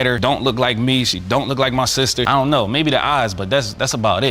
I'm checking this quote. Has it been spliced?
no; 0 cuts

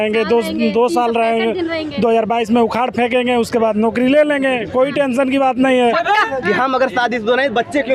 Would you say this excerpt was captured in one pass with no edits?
no; 1 cut; at 6.1 s

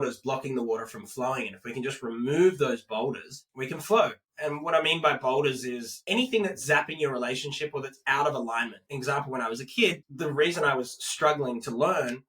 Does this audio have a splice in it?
yes; 3 cuts; at 6.0 s, 8.8 s, 10.1 s

